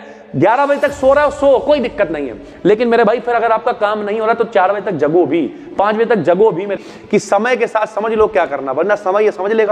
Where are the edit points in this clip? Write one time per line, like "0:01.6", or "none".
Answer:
0:06.8